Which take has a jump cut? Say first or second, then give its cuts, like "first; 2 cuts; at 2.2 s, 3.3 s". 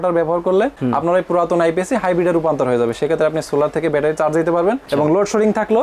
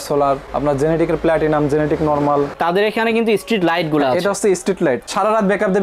second; 2 cuts; at 2.5 s, 5.0 s